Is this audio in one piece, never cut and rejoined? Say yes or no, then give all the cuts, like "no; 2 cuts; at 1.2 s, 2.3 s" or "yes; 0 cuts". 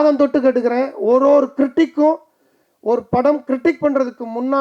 yes; 0 cuts